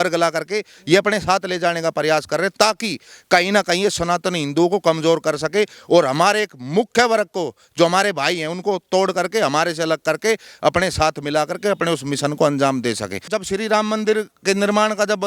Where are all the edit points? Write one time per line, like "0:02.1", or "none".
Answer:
0:13.3